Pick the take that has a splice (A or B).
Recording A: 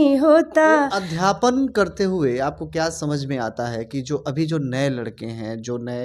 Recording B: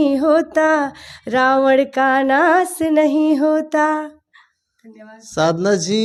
A